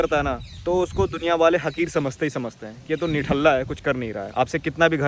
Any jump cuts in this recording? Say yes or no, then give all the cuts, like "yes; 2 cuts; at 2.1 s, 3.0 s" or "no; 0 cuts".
no; 0 cuts